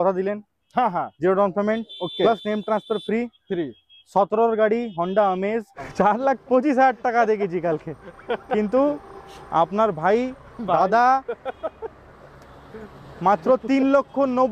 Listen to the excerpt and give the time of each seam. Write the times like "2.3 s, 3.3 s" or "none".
5.8 s